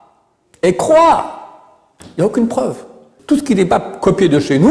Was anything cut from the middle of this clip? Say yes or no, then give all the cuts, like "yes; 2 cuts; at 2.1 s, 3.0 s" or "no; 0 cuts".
yes; 1 cut; at 3.2 s